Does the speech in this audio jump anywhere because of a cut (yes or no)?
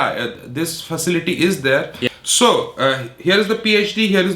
yes